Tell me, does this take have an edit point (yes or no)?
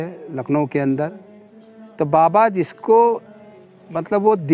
no